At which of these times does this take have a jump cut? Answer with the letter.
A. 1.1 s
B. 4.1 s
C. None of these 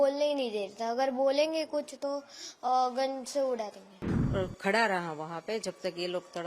B